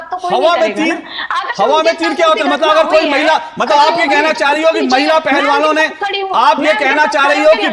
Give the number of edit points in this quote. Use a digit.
0